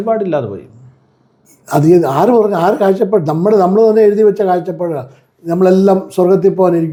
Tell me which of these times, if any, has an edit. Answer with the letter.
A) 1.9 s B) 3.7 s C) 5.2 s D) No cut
D